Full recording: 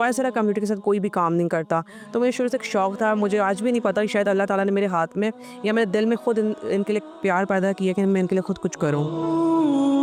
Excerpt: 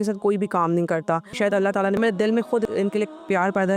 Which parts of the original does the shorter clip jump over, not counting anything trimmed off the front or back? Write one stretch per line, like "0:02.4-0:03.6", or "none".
0:02.1-0:05.3
0:06.4-0:06.6